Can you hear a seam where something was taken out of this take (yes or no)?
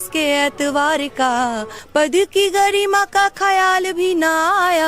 yes